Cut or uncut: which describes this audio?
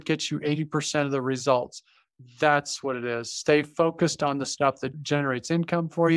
cut